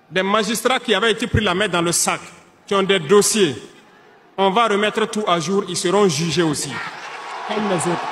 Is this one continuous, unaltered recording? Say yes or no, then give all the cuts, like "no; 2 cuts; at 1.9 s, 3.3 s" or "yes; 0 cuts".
yes; 0 cuts